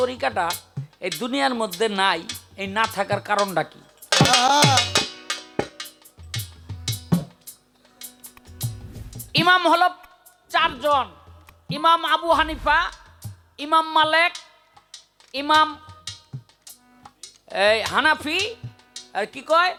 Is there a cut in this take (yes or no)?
no